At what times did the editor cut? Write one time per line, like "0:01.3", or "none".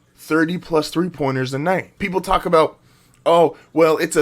0:01.9